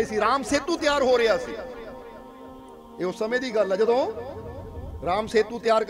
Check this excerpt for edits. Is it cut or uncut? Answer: uncut